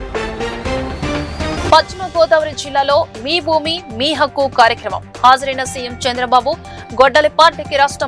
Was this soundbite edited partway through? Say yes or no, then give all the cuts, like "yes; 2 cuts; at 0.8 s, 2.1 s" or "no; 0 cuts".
yes; 1 cut; at 1.5 s